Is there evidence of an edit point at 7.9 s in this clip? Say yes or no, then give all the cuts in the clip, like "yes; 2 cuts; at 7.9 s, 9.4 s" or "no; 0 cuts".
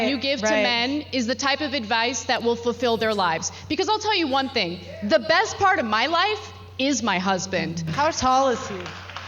yes; 1 cut; at 7.9 s